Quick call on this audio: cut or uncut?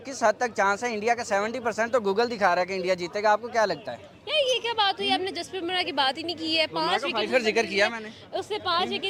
uncut